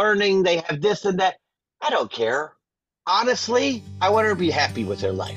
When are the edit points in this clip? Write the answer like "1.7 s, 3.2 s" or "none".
3.9 s